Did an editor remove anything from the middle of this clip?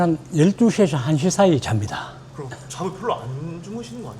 yes; 1 cut; at 2.3 s

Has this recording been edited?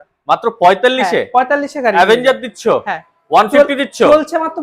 no; 0 cuts

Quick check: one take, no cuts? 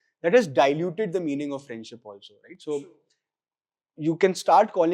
yes; 0 cuts

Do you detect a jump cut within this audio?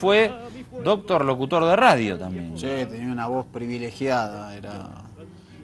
no; 0 cuts

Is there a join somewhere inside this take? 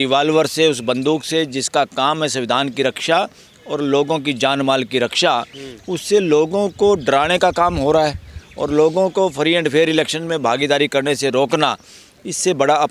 no; 0 cuts

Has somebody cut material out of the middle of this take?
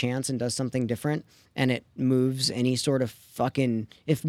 yes; 1 cut; at 1.9 s

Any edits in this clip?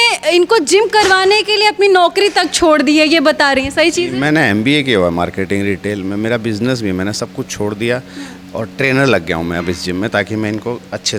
no; 0 cuts

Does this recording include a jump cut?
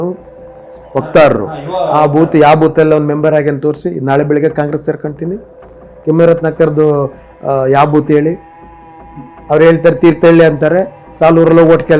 no; 0 cuts

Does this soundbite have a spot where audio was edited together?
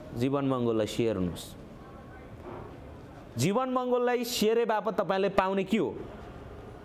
no; 0 cuts

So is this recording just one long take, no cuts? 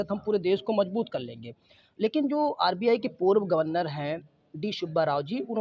yes; 0 cuts

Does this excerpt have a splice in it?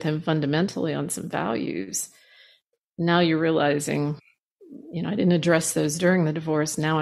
no; 0 cuts

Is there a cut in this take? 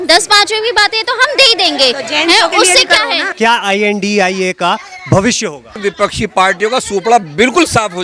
yes; 2 cuts; at 3.3 s, 5.8 s

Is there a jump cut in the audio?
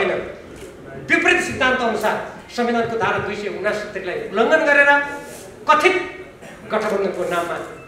no; 0 cuts

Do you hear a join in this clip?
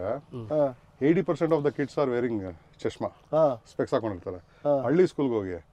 no; 0 cuts

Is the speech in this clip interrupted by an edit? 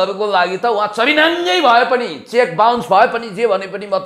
no; 0 cuts

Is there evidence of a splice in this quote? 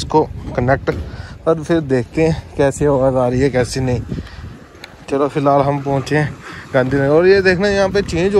no; 0 cuts

